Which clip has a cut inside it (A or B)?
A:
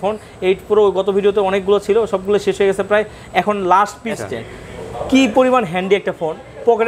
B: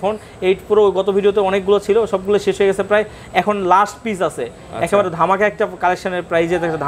A